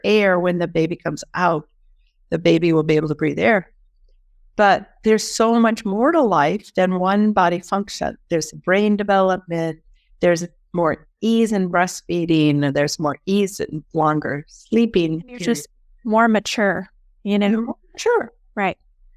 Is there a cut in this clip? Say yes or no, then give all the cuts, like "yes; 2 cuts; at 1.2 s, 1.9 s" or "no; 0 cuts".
no; 0 cuts